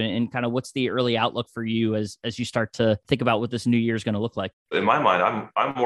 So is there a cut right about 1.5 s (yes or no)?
no